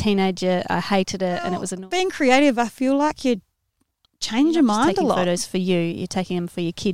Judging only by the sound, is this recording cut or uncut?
cut